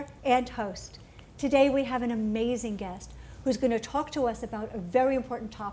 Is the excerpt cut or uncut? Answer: cut